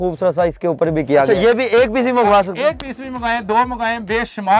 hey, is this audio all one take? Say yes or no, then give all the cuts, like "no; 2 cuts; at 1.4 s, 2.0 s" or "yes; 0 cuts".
no; 1 cut; at 1.3 s